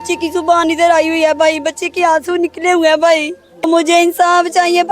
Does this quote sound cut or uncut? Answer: cut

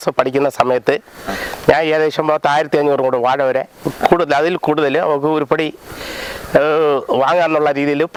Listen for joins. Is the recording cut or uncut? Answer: uncut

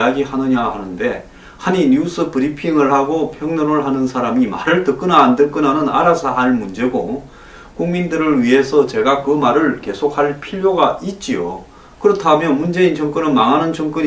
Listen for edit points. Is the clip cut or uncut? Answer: uncut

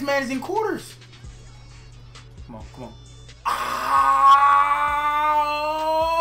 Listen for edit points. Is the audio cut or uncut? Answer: uncut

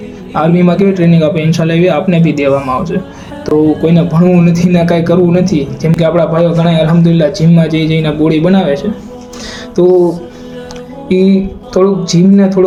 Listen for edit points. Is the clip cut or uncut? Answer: uncut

